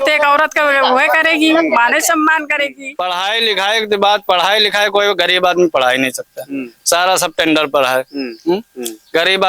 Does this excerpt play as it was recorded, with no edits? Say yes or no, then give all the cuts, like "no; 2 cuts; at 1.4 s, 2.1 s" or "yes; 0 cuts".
no; 1 cut; at 2.9 s